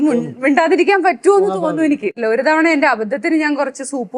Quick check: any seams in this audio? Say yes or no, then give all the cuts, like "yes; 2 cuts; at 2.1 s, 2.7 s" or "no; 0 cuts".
yes; 1 cut; at 2.2 s